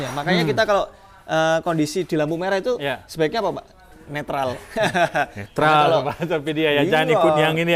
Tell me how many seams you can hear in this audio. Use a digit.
0